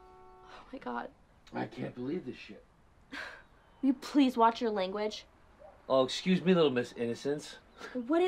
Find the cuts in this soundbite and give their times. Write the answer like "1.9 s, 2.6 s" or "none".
1.3 s